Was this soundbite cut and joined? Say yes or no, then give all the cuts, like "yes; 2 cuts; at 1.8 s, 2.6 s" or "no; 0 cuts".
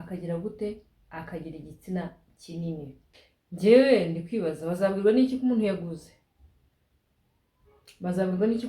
yes; 1 cut; at 3.0 s